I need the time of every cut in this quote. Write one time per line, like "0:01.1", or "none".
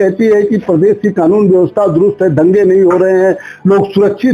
none